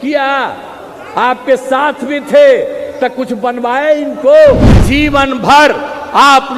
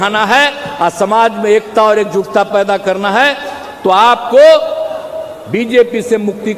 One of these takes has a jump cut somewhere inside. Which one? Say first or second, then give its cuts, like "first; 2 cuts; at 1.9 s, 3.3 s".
first; 1 cut; at 4.7 s